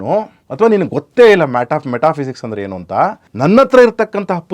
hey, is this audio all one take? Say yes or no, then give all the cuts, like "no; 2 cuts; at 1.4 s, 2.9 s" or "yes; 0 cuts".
no; 1 cut; at 3.2 s